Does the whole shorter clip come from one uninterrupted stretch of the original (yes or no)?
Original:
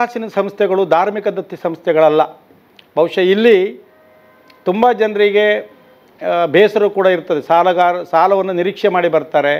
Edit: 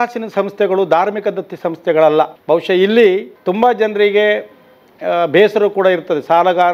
no